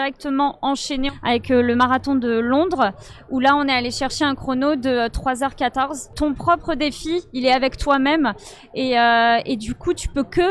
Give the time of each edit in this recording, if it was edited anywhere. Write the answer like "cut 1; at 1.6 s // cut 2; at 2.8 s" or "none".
cut 1; at 1.1 s // cut 2; at 6.1 s